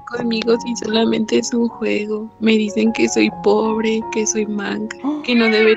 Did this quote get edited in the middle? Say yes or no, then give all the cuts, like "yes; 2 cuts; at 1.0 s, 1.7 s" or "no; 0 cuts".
no; 0 cuts